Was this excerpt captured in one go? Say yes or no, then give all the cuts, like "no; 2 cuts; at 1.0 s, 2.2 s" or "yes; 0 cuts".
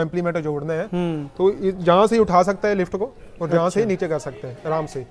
yes; 0 cuts